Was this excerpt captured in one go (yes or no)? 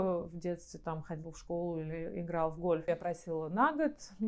no